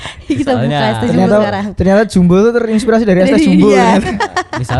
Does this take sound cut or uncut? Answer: uncut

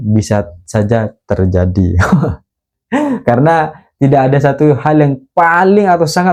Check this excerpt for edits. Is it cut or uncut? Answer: uncut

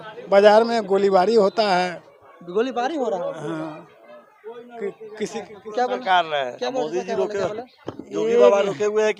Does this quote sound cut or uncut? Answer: uncut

